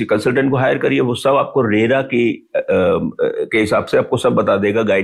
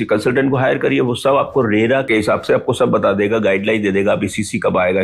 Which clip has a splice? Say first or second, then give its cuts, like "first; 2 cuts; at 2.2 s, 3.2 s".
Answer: second; 1 cut; at 2.1 s